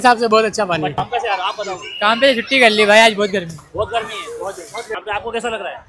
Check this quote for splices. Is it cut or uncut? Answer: cut